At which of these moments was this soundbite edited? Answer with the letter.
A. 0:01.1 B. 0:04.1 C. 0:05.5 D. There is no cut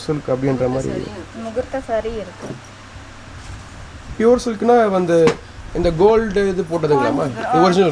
B